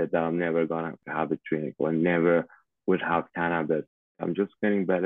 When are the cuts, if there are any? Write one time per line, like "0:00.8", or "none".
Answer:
0:01.1
0:04.1